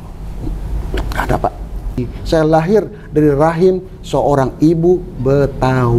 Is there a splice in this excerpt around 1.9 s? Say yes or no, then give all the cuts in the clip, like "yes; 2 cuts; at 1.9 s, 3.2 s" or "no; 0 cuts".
yes; 1 cut; at 1.9 s